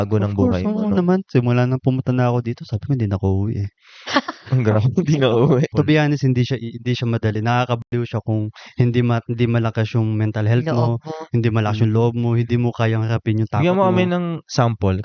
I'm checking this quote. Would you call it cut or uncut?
cut